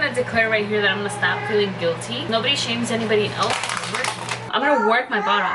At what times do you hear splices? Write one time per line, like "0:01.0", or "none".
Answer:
0:02.2
0:04.4